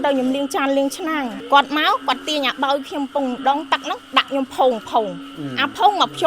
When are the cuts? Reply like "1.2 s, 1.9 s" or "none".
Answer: 1.4 s